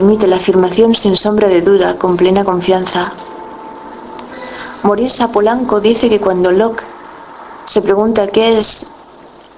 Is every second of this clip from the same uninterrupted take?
yes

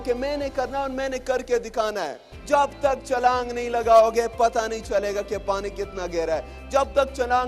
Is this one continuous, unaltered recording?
no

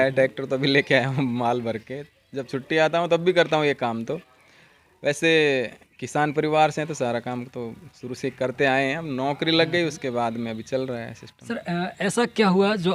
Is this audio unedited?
yes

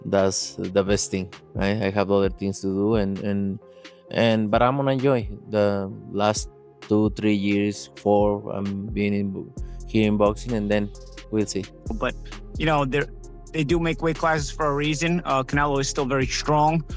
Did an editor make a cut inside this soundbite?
yes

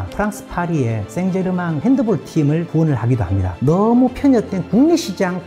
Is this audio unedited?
no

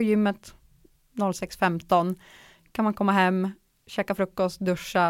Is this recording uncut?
yes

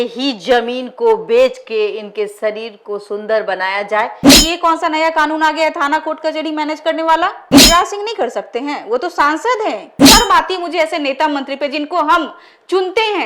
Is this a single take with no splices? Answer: no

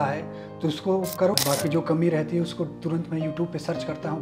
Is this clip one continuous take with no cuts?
no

